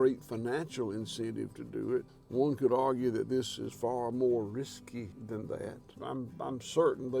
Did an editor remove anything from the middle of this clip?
yes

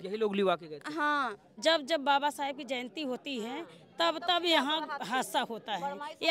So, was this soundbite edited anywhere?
yes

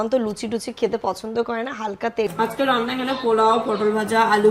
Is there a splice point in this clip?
yes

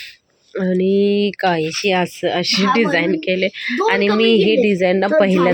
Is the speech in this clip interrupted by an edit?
no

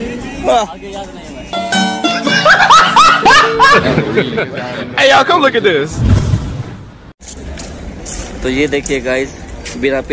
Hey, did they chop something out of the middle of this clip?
yes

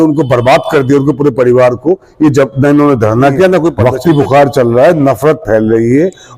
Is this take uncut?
no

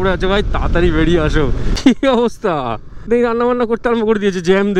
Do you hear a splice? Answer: yes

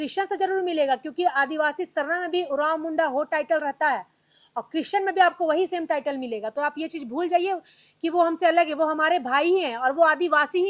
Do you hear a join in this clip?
no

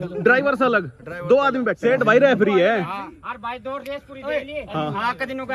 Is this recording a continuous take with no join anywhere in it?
no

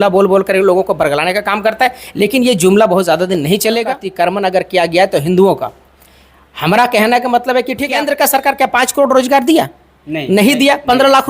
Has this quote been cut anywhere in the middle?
yes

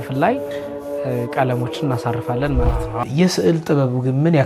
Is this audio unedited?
no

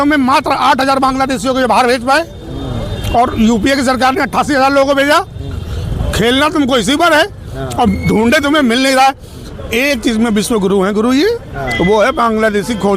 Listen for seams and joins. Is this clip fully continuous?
yes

